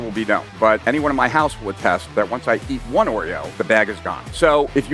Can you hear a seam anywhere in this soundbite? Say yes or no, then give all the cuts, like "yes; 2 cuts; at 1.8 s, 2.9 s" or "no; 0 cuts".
no; 0 cuts